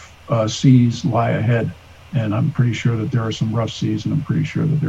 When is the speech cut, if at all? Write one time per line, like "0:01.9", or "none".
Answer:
none